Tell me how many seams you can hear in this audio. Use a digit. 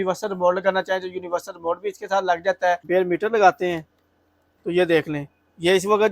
1